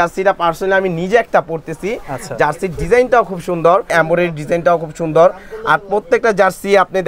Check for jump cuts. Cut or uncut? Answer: uncut